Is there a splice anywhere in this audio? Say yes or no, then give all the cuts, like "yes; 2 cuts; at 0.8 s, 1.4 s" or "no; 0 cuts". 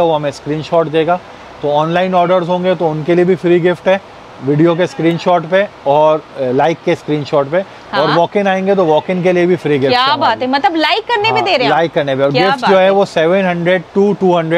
no; 0 cuts